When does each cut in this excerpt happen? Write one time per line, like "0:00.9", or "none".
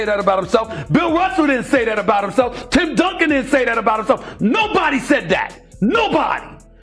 none